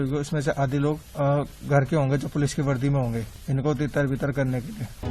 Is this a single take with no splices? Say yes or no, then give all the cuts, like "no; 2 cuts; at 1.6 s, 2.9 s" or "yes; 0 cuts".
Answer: no; 2 cuts; at 1.1 s, 3.4 s